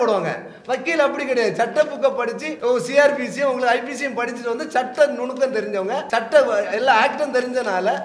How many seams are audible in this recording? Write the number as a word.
two